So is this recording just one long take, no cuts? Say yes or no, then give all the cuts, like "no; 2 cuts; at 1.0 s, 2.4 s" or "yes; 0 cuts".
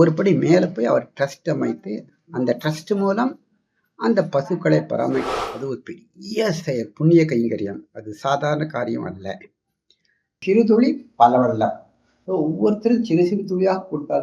no; 2 cuts; at 5.3 s, 10.4 s